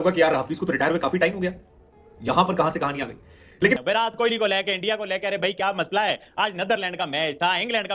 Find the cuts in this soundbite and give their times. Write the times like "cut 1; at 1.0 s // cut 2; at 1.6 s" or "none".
cut 1; at 3.8 s